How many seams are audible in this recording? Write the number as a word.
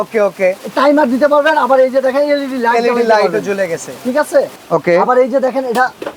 one